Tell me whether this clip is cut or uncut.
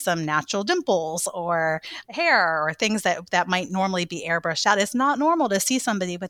uncut